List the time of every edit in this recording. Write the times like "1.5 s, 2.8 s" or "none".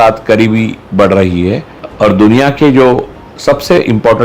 1.8 s